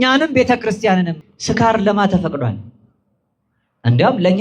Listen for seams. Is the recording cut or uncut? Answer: cut